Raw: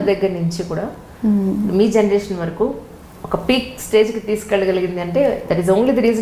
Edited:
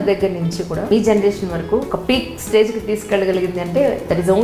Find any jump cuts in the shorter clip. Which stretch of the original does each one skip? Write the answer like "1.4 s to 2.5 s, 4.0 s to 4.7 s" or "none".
0.9 s to 1.8 s, 2.8 s to 3.3 s